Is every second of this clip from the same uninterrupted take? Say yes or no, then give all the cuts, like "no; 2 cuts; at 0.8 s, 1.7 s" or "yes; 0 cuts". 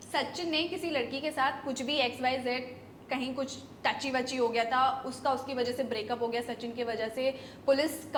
yes; 0 cuts